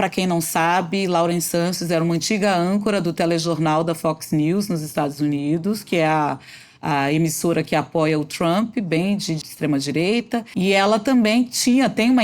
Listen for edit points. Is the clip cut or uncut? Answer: cut